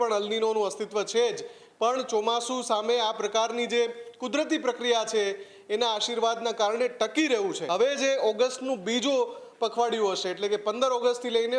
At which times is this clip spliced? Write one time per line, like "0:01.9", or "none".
0:07.6